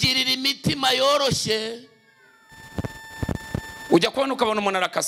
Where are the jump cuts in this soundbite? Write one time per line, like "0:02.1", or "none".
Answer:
0:02.6